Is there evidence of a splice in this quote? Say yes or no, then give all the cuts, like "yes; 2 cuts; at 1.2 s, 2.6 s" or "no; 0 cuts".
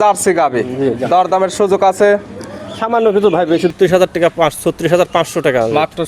yes; 1 cut; at 3.7 s